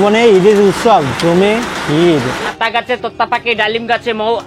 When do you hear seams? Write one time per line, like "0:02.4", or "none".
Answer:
0:02.5